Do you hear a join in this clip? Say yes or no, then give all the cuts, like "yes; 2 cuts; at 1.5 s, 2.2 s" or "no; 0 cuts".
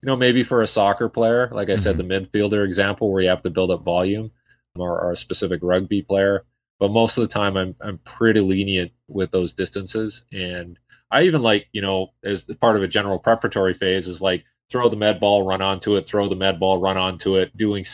yes; 1 cut; at 4.7 s